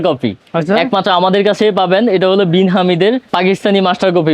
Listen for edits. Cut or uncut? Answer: cut